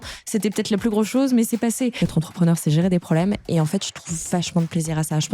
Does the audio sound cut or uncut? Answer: cut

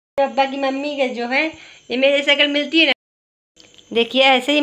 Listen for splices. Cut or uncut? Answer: cut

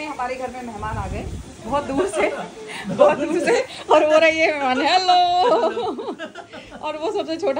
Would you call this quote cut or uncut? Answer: uncut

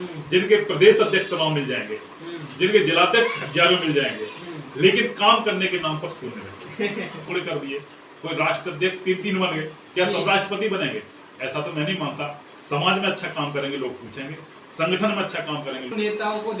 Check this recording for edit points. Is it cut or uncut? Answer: cut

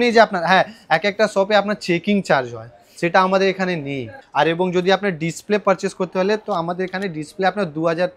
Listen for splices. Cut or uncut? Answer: cut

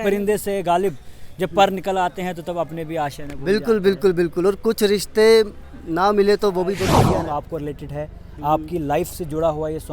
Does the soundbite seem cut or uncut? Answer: cut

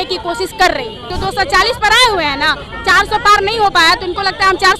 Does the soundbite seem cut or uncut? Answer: cut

